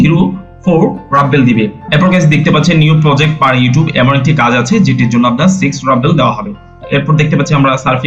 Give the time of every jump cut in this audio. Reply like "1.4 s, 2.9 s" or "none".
1.8 s